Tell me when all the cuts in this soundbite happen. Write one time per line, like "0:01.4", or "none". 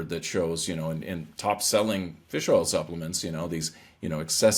none